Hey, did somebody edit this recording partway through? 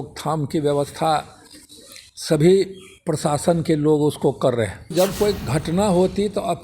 yes; 1 cut; at 4.9 s

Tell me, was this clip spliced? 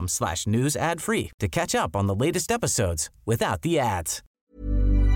yes; 1 cut; at 4.2 s

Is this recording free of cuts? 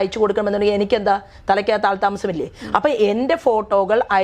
yes; 0 cuts

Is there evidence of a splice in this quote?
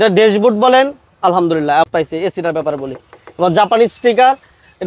yes; 1 cut; at 1.9 s

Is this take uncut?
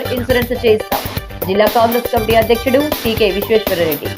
yes; 0 cuts

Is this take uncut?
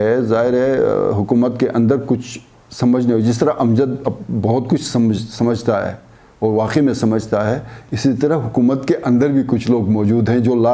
yes; 0 cuts

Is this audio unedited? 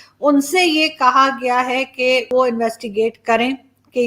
no; 1 cut; at 2.3 s

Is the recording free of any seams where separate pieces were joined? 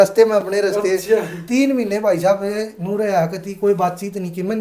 yes; 0 cuts

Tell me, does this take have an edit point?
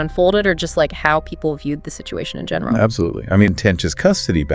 yes; 1 cut; at 3.5 s

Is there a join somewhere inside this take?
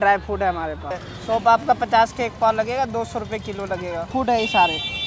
yes; 2 cuts; at 1.0 s, 4.1 s

